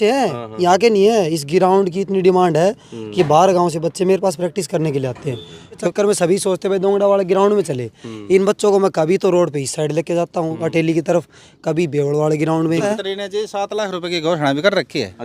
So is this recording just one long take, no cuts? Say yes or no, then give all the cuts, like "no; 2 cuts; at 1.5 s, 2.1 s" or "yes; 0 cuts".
no; 2 cuts; at 5.9 s, 12.9 s